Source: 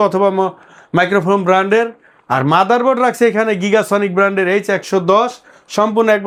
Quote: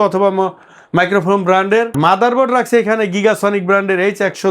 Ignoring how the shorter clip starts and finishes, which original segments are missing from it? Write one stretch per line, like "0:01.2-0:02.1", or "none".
0:01.9-0:02.4